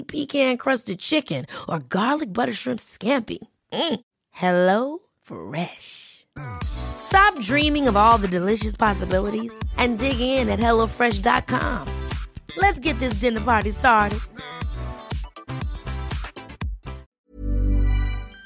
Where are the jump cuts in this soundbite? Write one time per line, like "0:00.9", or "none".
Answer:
0:17.0